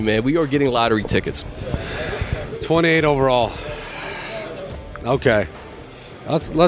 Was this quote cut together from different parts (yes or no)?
yes